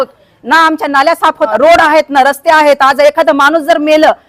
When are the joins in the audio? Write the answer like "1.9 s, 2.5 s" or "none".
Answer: 1.5 s

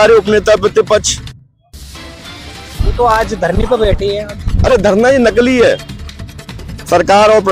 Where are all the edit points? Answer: none

